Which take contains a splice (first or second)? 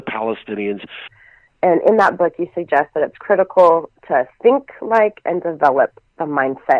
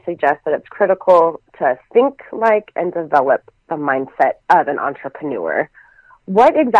first